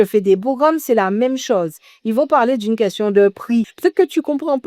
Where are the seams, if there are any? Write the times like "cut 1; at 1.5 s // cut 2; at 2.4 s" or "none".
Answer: cut 1; at 3.7 s